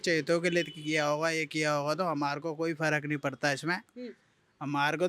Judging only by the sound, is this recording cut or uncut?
uncut